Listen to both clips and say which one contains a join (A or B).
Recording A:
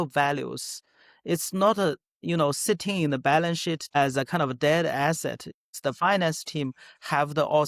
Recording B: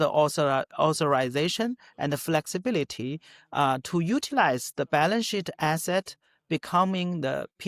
A